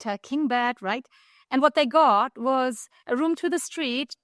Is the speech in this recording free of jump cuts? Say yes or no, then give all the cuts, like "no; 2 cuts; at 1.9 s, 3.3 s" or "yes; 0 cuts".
yes; 0 cuts